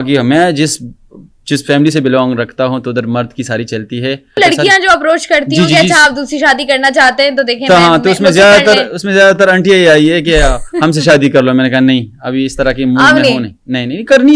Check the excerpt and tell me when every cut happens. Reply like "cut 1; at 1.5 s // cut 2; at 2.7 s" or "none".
cut 1; at 4.4 s